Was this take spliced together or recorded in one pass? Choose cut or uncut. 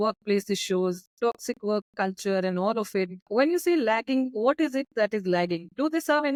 uncut